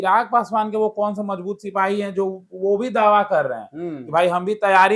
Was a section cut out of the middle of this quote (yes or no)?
no